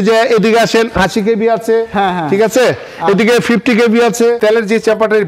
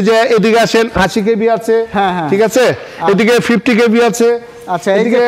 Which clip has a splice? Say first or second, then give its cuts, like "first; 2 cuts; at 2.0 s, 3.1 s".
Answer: first; 1 cut; at 4.4 s